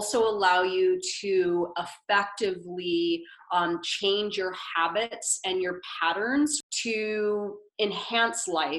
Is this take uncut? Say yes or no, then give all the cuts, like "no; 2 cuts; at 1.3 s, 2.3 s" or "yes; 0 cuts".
no; 1 cut; at 6.6 s